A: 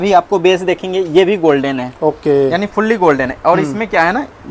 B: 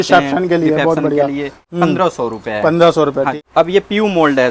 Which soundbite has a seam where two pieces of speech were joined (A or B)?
B